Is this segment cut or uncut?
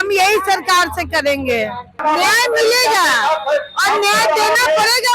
cut